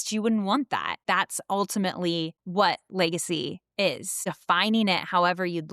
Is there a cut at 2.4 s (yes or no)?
yes